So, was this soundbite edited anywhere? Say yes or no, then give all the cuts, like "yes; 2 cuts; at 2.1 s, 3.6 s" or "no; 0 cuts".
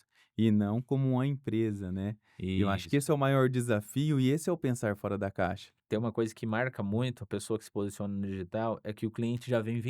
yes; 1 cut; at 5.7 s